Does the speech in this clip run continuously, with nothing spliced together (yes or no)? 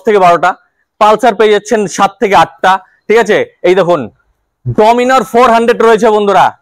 yes